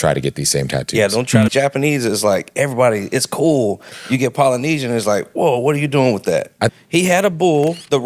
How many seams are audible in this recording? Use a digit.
2